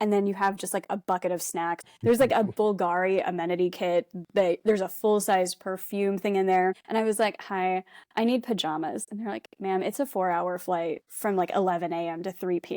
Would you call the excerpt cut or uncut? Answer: cut